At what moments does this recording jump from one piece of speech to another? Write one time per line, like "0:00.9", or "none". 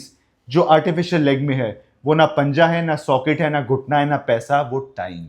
none